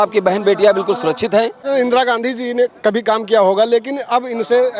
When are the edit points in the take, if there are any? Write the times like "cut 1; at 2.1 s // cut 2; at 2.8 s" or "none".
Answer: cut 1; at 1.7 s